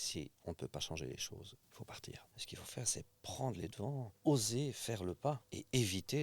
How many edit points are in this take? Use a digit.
1